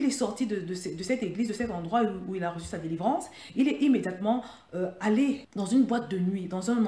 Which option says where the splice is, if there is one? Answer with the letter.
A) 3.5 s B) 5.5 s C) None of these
B